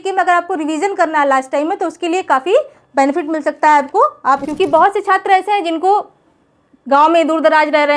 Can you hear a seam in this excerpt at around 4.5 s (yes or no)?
yes